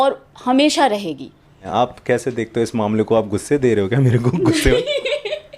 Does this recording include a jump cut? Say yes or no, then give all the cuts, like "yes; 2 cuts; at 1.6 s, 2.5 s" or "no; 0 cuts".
yes; 1 cut; at 1.6 s